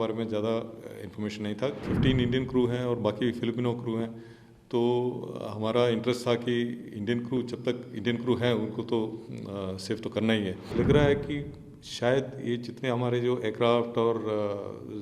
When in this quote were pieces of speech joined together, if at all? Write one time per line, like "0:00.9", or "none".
0:01.9
0:10.7